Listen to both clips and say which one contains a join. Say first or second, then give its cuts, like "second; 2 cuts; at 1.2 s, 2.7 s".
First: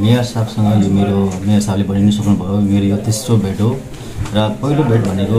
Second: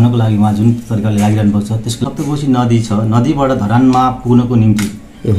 second; 1 cut; at 2.0 s